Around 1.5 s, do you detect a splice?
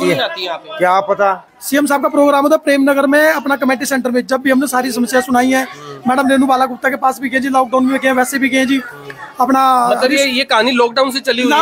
yes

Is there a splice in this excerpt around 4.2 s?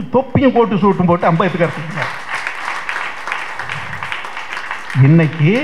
no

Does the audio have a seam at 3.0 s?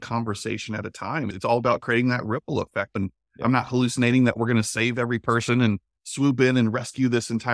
yes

